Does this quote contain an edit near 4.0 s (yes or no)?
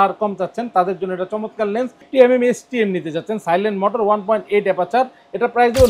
no